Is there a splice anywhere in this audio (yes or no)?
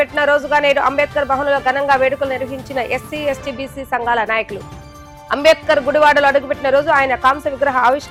no